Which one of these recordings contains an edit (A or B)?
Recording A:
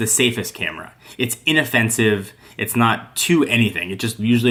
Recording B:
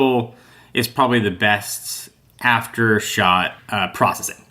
B